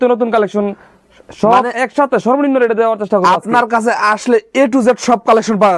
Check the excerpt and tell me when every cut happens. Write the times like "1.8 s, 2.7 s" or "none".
none